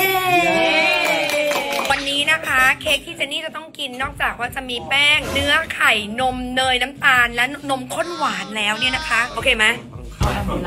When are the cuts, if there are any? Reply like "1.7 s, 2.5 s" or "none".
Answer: 5.2 s, 9.3 s